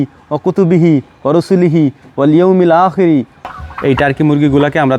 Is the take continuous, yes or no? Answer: no